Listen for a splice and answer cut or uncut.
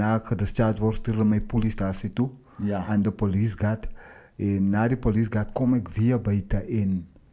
uncut